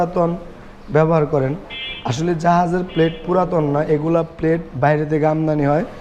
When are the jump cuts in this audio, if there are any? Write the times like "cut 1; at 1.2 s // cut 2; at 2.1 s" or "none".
none